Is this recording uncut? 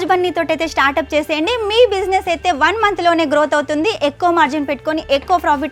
yes; 0 cuts

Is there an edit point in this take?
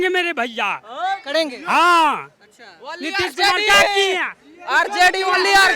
no; 0 cuts

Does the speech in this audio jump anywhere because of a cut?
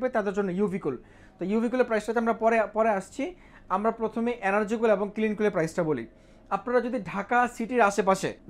no; 0 cuts

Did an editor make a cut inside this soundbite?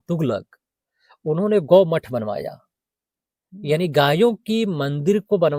no; 0 cuts

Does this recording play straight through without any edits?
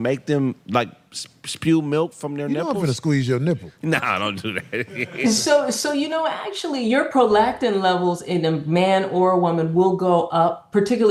yes; 0 cuts

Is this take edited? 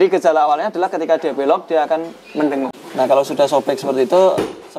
yes; 1 cut; at 2.8 s

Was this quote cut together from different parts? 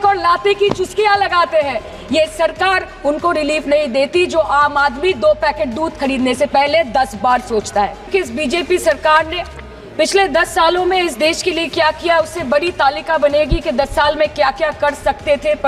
yes; 1 cut; at 8.1 s

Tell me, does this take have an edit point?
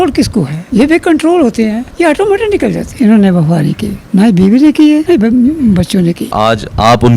yes; 4 cuts; at 2.9 s, 3.9 s, 5.0 s, 6.3 s

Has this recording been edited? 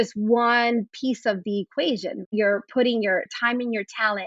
yes; 2 cuts; at 2.3 s, 3.3 s

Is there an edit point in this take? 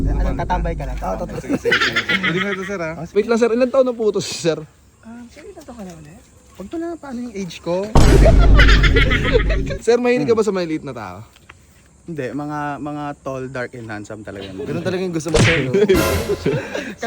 yes; 2 cuts; at 3.1 s, 9.7 s

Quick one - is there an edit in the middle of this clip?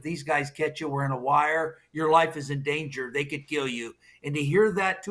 no; 0 cuts

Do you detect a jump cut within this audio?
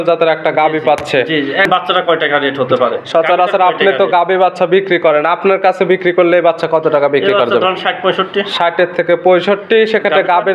yes; 1 cut; at 1.7 s

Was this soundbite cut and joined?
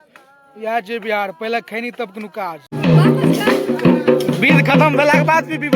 yes; 1 cut; at 2.7 s

